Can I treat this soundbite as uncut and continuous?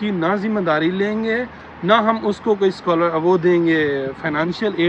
yes; 0 cuts

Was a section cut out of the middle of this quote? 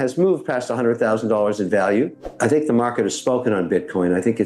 yes; 1 cut; at 2.3 s

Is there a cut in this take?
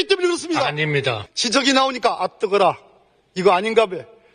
yes; 1 cut; at 1.3 s

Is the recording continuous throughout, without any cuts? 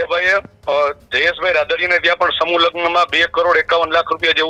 yes; 0 cuts

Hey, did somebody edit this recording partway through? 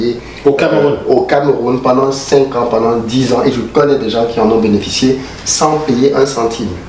no; 0 cuts

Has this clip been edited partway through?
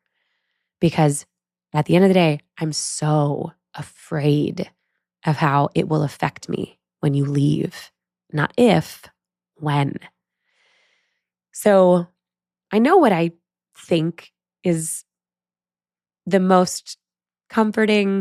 no; 0 cuts

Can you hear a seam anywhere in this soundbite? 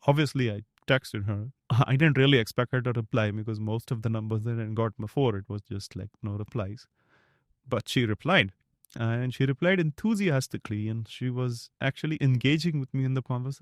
no; 0 cuts

